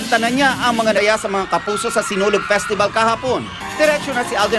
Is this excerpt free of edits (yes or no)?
yes